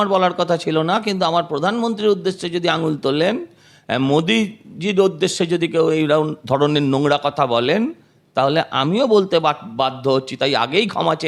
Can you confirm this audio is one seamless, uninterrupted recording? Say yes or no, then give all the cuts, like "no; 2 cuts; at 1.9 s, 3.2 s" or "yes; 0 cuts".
yes; 0 cuts